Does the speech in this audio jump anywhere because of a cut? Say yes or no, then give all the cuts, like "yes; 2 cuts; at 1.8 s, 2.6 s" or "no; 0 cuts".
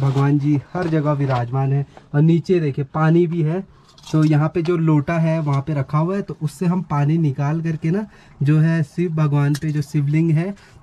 no; 0 cuts